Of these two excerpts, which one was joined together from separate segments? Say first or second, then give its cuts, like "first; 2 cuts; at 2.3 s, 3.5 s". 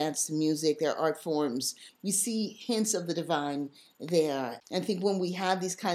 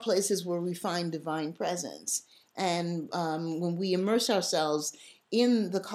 first; 2 cuts; at 1.9 s, 4.6 s